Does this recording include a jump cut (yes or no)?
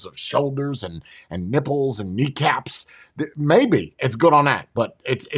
no